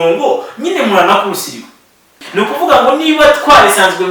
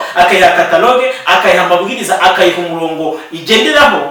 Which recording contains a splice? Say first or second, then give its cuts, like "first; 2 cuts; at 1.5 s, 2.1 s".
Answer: first; 1 cut; at 2.1 s